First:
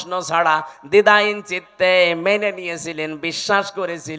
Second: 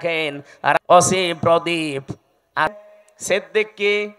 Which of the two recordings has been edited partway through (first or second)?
second